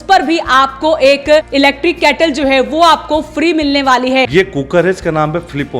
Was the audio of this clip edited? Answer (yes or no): yes